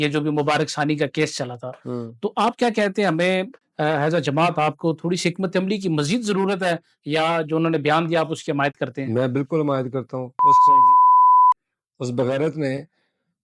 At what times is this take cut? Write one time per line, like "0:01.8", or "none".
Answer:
0:03.6